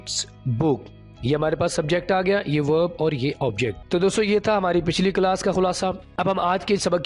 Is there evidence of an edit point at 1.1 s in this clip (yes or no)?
no